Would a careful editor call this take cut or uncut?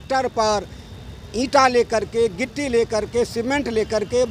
uncut